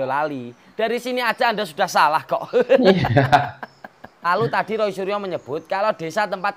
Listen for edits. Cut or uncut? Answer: uncut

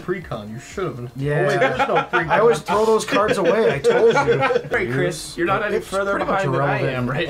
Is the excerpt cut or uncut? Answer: cut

